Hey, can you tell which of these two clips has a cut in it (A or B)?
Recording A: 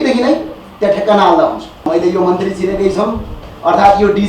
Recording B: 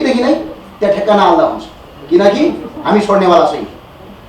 A